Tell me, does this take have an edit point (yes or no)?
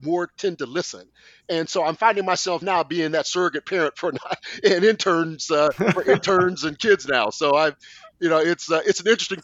no